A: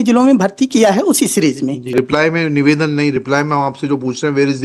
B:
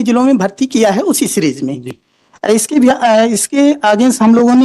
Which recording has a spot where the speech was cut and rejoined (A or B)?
A